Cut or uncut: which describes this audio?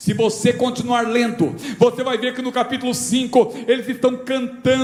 uncut